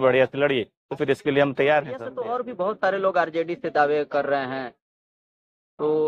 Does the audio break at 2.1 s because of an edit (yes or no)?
yes